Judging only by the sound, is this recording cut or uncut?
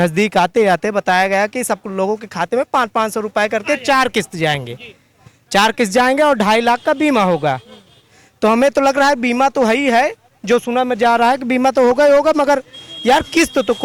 uncut